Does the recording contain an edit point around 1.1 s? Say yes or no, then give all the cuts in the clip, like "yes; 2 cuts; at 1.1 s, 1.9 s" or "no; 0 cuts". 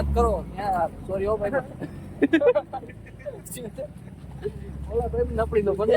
yes; 1 cut; at 1.1 s